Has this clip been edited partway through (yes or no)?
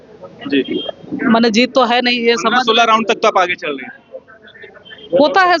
no